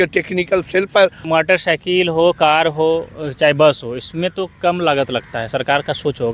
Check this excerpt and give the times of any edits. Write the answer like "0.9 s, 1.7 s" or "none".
1.2 s

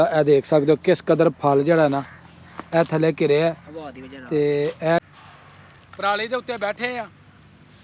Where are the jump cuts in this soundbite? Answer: 5.0 s

